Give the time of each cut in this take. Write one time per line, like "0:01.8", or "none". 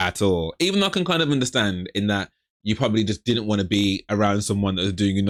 none